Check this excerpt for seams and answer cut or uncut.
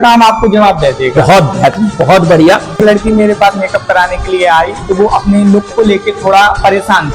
cut